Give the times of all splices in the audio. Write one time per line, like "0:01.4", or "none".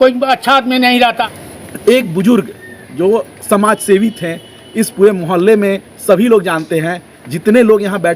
0:01.2